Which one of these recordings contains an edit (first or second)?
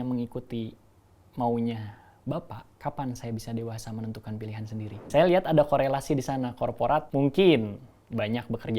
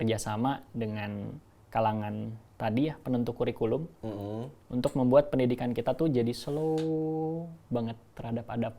first